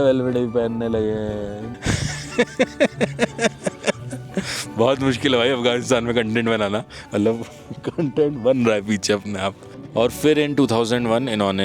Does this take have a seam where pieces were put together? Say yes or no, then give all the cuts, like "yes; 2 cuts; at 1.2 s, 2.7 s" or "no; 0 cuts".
yes; 2 cuts; at 1.7 s, 9.7 s